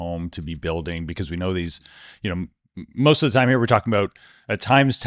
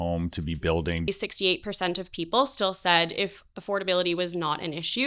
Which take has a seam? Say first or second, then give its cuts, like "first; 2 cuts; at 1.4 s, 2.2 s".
second; 1 cut; at 1.1 s